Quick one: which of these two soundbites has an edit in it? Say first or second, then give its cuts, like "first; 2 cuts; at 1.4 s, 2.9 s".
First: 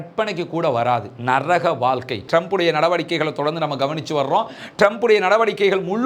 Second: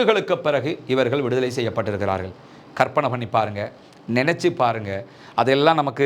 first; 1 cut; at 2.2 s